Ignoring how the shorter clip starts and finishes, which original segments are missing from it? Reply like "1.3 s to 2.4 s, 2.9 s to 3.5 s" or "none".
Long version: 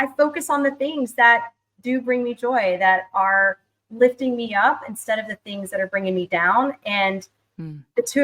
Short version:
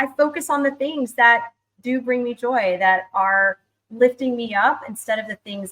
none

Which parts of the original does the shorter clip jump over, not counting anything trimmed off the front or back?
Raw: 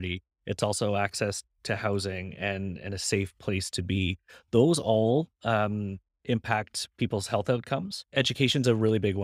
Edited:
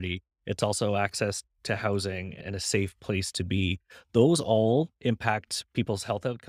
2.3 s to 2.7 s, 5.3 s to 6.2 s

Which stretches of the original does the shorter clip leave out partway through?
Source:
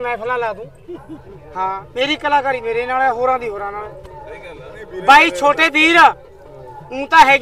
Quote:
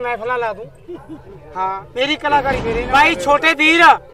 2.9 s to 5.0 s

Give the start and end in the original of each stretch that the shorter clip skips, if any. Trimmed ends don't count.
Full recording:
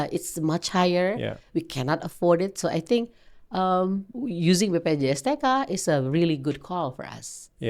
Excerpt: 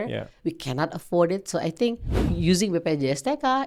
3.3 s to 4.2 s

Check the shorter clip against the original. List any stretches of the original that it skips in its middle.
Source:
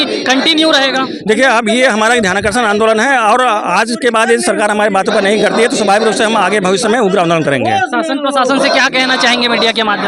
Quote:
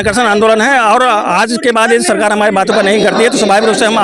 none

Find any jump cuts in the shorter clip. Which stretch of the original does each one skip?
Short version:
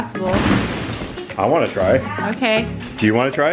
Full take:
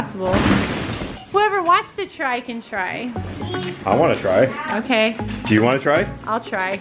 1.2 s to 3.7 s

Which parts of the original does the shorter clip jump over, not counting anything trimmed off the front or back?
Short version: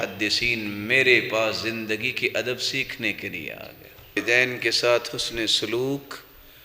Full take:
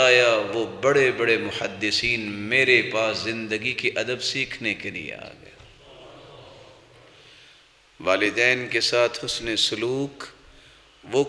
5.8 s to 8.3 s

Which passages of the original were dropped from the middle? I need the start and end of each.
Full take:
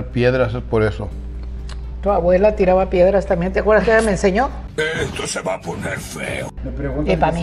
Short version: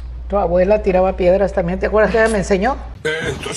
none

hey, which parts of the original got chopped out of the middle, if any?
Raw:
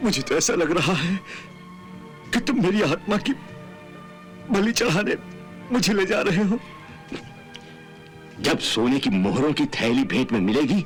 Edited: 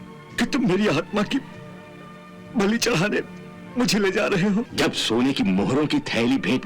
6.6 s to 8.4 s

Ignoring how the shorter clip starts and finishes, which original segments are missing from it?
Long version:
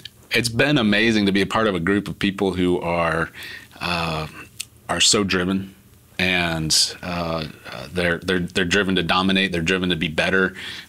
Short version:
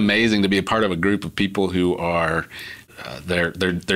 3.7 s to 7.6 s

